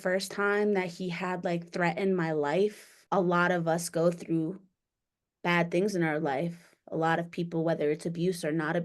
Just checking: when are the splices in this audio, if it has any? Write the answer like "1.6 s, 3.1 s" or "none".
2.9 s